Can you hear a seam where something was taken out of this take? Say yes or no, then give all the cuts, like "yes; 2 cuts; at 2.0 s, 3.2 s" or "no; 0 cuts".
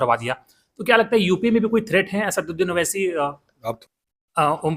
yes; 1 cut; at 3.8 s